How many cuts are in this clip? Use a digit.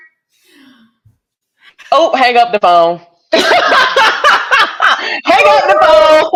0